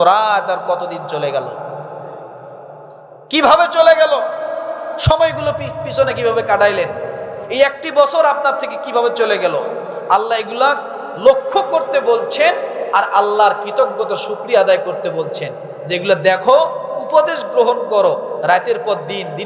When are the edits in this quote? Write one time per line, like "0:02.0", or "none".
none

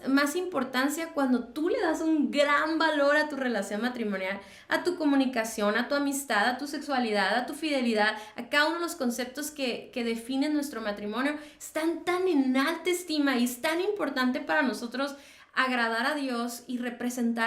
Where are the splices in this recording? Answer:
none

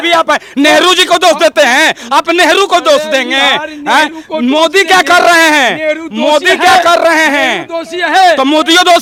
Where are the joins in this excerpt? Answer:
none

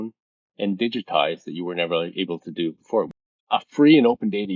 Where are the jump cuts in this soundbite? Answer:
0:03.1

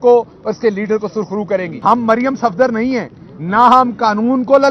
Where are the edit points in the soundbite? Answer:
0:01.7

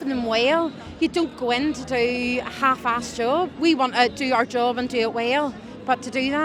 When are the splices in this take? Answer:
0:03.5

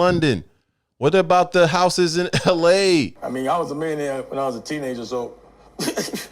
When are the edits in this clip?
0:03.1

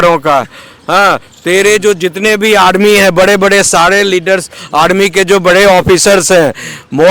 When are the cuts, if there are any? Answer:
none

